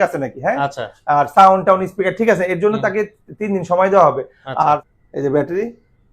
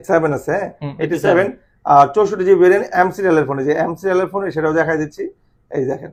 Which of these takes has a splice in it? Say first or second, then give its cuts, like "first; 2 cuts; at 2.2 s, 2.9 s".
first; 1 cut; at 4.8 s